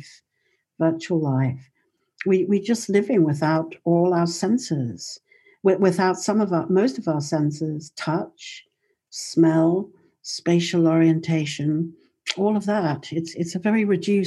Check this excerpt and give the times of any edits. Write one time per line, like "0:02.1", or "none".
none